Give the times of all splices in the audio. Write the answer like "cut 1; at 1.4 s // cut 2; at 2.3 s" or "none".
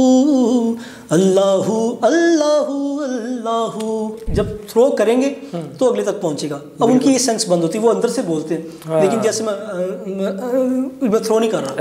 cut 1; at 4.2 s